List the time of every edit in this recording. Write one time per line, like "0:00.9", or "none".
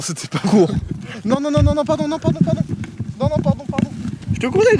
none